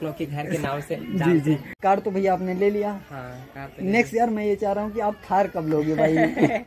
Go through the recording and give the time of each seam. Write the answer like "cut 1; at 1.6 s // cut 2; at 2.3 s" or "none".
cut 1; at 1.7 s